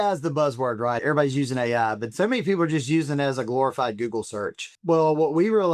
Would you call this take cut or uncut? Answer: cut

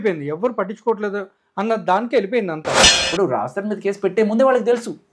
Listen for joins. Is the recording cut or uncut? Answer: cut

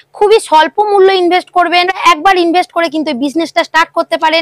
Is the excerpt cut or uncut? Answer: cut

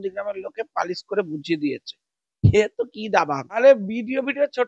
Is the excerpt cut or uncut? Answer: cut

